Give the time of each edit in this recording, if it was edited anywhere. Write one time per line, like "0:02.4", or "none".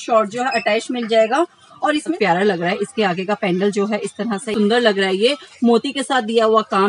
0:02.1
0:04.5